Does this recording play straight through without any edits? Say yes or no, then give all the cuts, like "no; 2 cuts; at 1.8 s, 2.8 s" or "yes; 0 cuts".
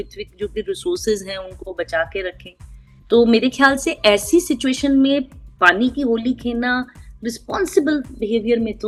yes; 0 cuts